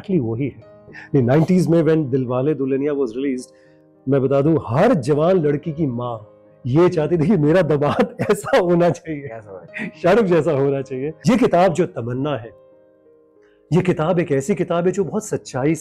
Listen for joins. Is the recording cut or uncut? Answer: cut